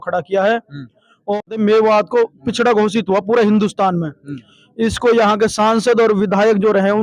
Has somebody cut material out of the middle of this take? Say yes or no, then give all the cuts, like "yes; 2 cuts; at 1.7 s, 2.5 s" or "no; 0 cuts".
yes; 1 cut; at 1.3 s